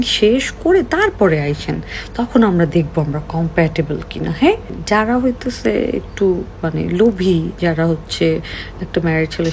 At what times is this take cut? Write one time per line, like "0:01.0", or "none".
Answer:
0:04.7